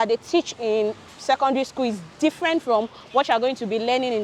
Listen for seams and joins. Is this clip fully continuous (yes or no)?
yes